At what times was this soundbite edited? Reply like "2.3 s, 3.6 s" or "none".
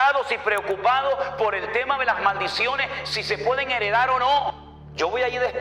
4.6 s